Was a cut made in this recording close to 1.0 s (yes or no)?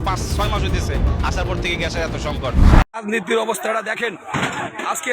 no